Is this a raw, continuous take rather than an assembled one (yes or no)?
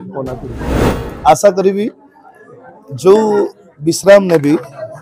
no